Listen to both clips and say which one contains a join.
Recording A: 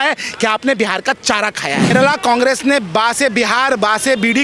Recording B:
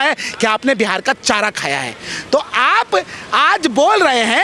A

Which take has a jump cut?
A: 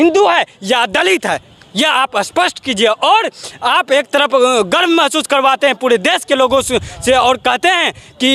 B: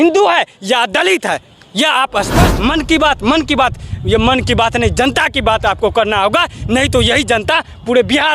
B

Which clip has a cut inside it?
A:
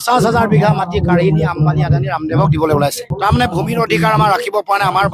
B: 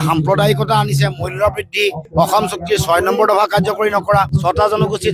A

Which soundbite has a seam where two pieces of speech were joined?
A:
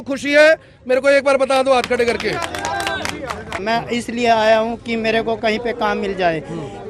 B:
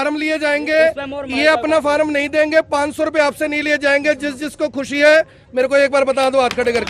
A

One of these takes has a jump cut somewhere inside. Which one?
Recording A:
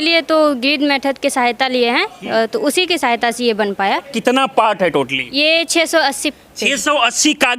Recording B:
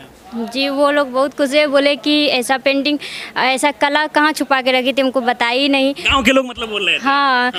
A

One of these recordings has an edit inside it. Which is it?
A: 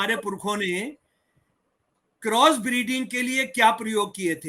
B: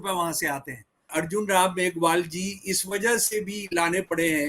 B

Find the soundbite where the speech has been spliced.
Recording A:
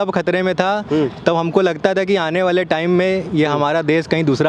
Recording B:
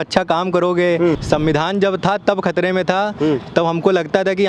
B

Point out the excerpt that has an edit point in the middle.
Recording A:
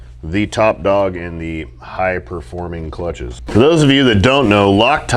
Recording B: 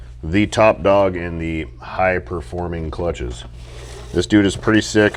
A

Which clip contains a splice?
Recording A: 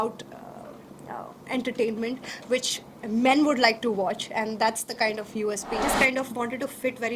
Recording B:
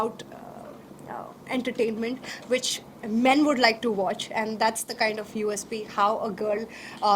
A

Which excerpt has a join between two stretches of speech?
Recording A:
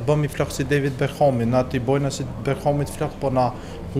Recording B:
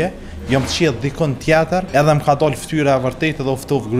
B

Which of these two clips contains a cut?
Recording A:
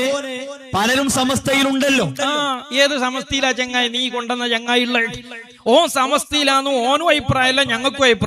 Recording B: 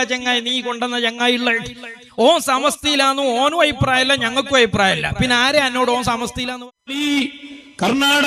B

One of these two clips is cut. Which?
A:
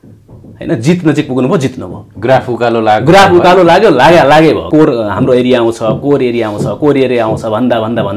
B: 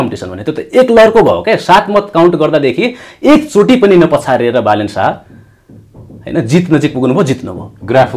A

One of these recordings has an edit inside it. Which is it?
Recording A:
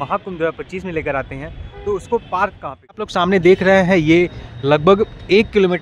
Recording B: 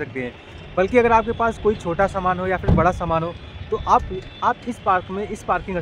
A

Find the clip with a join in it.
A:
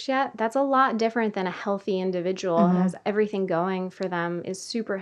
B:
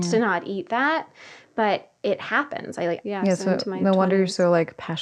B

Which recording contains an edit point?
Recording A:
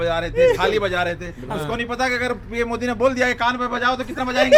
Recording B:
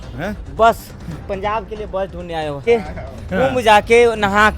B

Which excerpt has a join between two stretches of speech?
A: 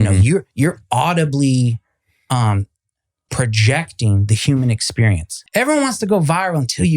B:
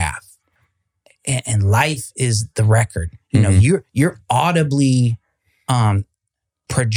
A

